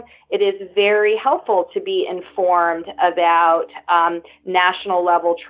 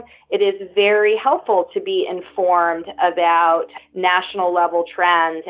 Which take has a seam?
second; 1 cut; at 3.8 s

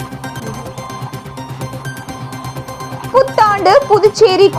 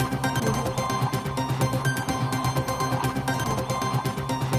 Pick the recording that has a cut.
first; 1 cut; at 3.0 s

